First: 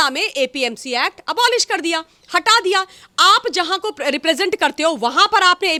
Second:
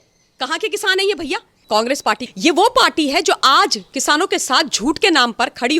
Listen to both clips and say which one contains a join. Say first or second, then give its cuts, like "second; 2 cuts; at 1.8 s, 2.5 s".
second; 1 cut; at 1.8 s